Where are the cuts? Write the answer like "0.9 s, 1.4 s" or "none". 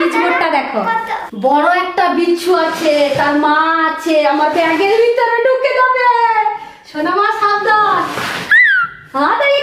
1.3 s